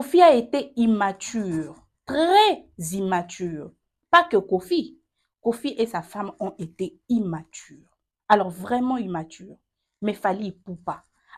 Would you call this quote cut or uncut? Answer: uncut